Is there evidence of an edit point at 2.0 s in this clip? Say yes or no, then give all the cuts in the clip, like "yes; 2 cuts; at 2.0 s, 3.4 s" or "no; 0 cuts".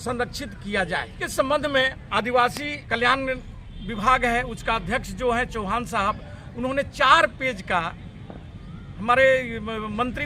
yes; 3 cuts; at 1.2 s, 2.0 s, 2.8 s